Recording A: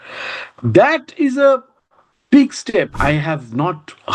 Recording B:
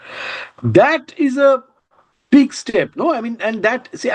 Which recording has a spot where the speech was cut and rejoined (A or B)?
A